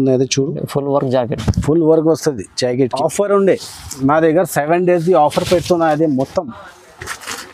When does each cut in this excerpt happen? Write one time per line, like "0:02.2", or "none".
0:02.8